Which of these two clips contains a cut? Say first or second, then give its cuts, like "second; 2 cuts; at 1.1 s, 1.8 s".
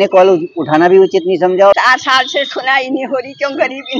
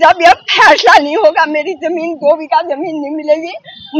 first; 1 cut; at 1.8 s